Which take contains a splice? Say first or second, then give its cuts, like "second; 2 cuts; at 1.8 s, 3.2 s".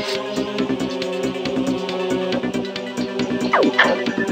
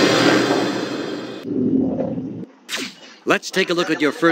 second; 1 cut; at 1.3 s